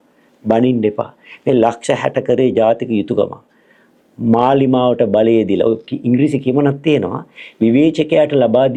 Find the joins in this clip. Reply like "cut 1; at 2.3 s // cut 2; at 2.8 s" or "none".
none